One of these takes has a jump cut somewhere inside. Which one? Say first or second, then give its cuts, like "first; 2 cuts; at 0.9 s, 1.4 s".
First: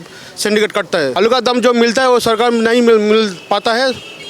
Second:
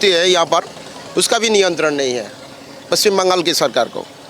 first; 1 cut; at 1.2 s